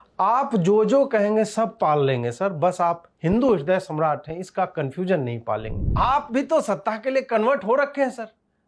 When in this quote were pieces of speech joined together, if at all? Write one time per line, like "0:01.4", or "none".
0:05.8